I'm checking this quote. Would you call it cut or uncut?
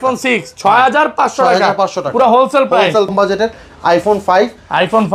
cut